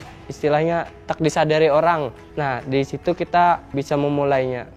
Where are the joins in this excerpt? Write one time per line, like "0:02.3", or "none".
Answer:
0:02.2
0:03.7